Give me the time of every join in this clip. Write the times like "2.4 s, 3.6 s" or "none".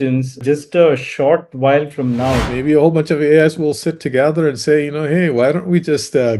2.4 s